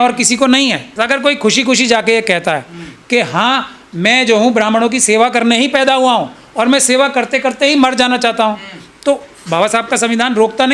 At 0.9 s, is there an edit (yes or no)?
yes